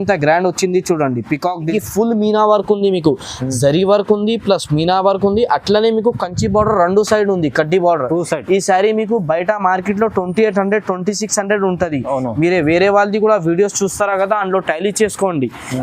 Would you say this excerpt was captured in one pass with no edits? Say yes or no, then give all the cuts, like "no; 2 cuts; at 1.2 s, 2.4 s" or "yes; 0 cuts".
no; 1 cut; at 1.7 s